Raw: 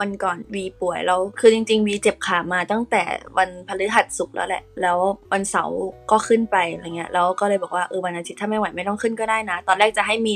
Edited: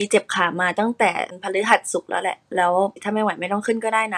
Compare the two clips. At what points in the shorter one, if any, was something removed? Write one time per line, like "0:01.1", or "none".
0:01.3
0:03.0